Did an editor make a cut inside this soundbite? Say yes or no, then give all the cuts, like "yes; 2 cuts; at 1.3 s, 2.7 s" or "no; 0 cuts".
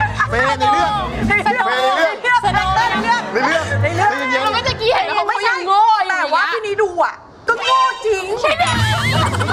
no; 0 cuts